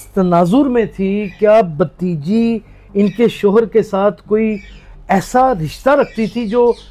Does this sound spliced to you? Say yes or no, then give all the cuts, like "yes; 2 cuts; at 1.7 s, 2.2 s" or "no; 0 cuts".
no; 0 cuts